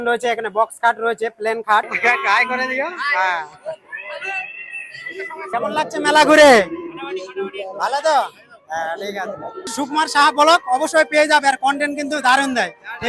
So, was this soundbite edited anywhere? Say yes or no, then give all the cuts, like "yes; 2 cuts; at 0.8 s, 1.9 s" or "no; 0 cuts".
yes; 3 cuts; at 1.9 s, 5.5 s, 9.8 s